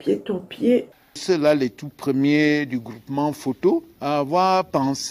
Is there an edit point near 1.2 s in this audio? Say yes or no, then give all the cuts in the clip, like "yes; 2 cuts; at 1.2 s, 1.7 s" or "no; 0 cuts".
yes; 1 cut; at 1.2 s